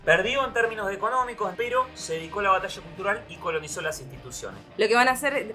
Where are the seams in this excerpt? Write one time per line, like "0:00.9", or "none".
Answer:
0:01.5
0:04.6